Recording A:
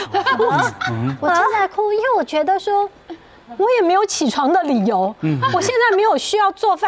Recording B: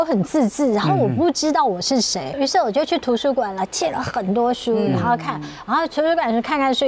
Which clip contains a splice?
B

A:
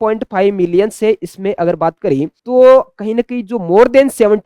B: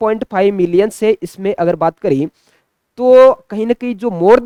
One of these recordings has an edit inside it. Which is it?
A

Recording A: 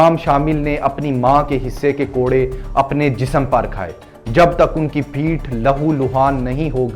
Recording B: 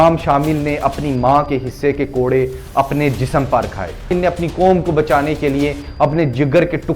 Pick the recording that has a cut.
B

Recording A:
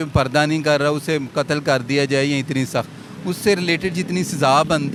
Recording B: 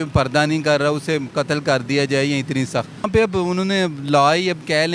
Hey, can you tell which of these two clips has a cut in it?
B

